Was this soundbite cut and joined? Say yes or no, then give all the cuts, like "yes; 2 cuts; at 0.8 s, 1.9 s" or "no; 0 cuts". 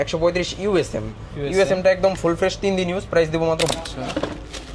yes; 1 cut; at 3.7 s